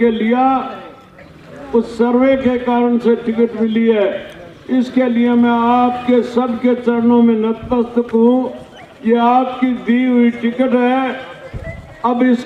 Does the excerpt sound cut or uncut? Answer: uncut